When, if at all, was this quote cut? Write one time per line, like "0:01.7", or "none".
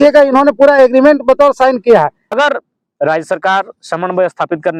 0:02.2